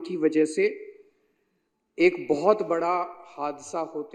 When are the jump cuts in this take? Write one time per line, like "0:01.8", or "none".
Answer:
none